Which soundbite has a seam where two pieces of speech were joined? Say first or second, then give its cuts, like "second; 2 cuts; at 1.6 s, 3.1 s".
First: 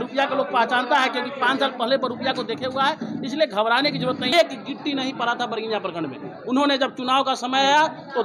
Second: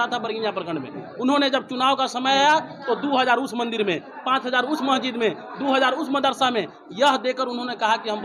first; 1 cut; at 4.3 s